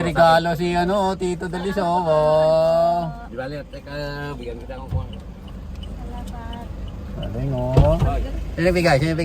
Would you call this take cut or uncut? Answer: uncut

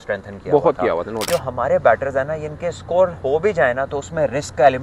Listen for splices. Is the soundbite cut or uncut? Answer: cut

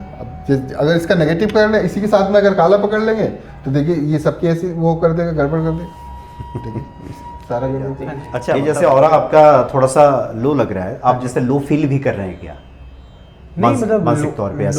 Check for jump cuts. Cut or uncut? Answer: cut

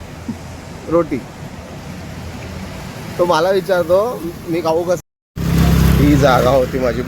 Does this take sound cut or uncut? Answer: cut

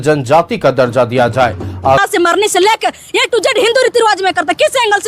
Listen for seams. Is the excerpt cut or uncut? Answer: cut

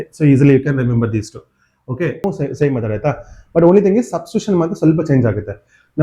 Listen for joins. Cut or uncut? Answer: cut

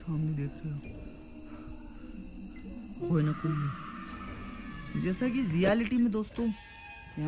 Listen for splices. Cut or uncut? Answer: uncut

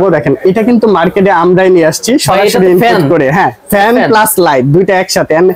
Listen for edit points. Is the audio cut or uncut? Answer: uncut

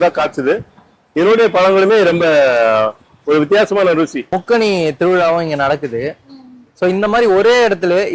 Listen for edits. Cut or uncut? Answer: cut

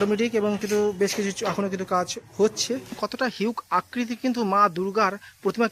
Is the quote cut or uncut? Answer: cut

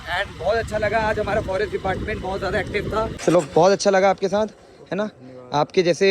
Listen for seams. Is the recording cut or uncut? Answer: cut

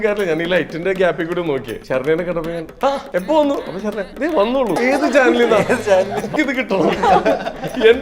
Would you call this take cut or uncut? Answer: cut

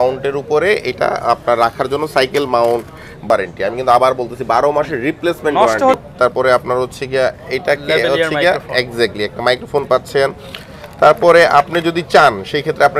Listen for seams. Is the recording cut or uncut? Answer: cut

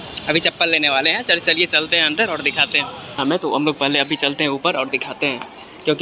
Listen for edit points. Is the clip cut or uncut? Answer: cut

